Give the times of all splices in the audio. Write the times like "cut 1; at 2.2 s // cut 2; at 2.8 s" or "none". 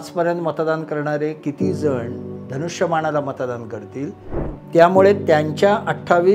cut 1; at 4.4 s